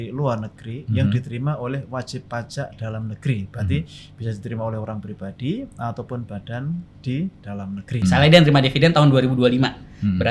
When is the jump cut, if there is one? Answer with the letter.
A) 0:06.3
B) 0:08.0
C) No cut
B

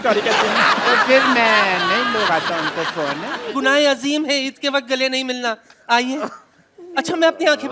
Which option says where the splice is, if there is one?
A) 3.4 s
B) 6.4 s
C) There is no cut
A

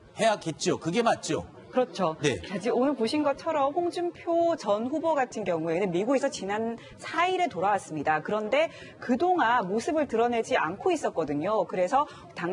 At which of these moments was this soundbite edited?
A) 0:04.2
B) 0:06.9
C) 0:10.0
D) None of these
B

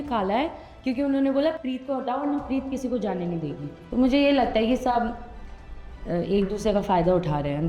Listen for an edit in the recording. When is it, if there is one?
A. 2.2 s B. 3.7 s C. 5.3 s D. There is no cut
B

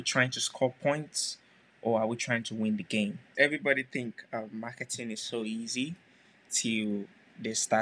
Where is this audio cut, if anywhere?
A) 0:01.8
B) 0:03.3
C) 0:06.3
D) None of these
B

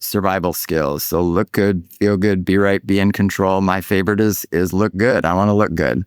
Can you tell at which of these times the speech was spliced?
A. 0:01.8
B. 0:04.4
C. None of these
C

